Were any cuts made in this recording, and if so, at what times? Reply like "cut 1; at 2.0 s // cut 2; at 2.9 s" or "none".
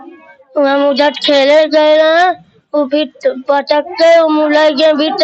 none